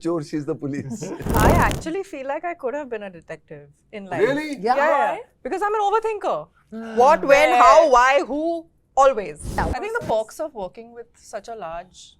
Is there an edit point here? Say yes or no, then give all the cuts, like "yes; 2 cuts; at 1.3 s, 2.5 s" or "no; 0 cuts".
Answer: yes; 2 cuts; at 1.3 s, 9.6 s